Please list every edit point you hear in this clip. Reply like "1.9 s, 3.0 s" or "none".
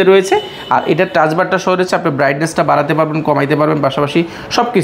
none